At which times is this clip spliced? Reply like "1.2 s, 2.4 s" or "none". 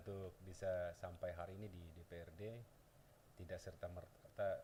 none